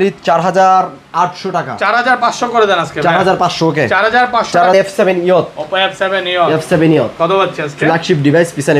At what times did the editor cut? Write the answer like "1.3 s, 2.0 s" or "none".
4.7 s